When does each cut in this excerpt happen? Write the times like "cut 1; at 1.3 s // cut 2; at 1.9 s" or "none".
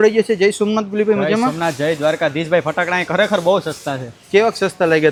none